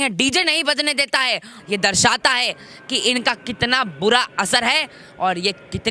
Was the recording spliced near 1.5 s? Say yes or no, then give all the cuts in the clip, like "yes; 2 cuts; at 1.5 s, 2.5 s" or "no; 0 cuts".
yes; 1 cut; at 1.5 s